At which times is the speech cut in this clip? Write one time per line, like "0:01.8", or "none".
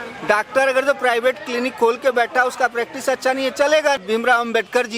0:04.0